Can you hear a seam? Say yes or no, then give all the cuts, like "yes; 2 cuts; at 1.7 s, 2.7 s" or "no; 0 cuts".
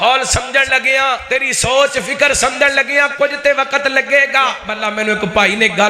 yes; 2 cuts; at 1.2 s, 4.7 s